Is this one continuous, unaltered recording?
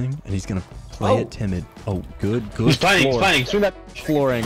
yes; 0 cuts

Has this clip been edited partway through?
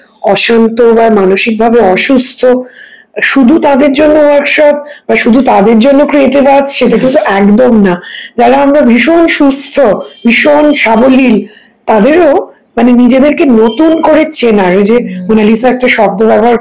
no; 0 cuts

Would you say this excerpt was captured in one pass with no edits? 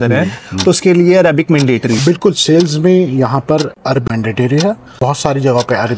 no; 3 cuts; at 2.0 s, 4.0 s, 4.9 s

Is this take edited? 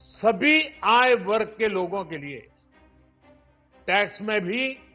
yes; 2 cuts; at 2.5 s, 3.8 s

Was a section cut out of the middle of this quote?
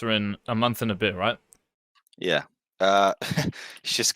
yes; 1 cut; at 2.6 s

